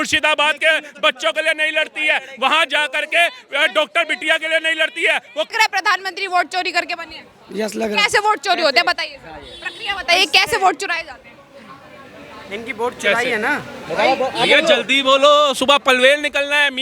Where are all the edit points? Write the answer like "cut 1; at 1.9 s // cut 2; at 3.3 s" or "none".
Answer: cut 1; at 5.5 s